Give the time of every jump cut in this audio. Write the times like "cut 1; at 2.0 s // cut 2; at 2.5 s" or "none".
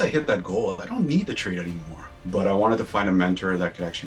cut 1; at 2.2 s